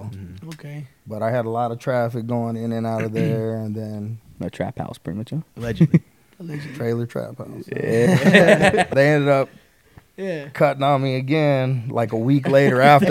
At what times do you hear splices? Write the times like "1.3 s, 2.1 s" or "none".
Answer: 8.9 s